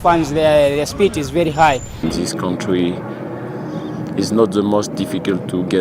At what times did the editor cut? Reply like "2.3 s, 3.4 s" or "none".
2.1 s